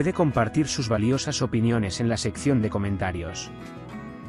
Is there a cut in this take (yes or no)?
no